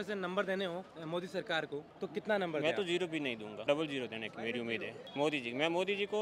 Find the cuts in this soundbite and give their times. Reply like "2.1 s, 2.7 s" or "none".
0.9 s, 1.9 s, 3.5 s, 5.0 s